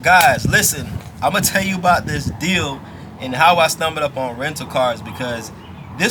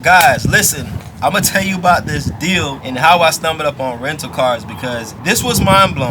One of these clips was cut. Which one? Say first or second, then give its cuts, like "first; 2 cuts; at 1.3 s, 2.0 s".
second; 2 cuts; at 2.8 s, 5.1 s